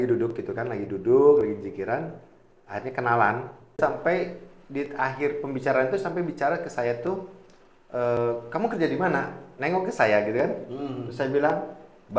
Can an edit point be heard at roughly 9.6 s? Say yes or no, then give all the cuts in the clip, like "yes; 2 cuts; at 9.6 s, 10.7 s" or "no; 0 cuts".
no; 1 cut; at 3.8 s